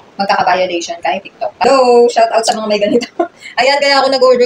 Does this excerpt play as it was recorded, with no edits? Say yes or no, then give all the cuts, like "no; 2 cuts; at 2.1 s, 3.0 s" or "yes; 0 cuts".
no; 1 cut; at 1.6 s